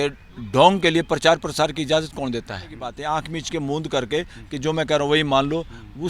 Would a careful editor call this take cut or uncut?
cut